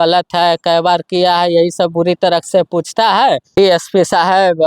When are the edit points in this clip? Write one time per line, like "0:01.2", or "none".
0:03.8